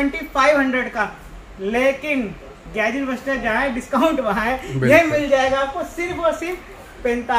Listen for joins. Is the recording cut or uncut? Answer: uncut